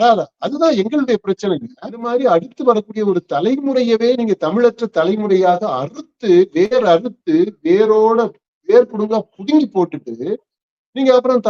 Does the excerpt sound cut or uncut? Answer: cut